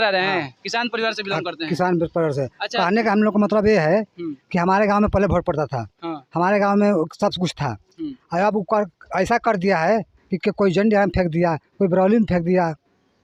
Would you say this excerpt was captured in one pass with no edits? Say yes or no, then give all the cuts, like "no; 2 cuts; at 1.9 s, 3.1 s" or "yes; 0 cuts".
yes; 0 cuts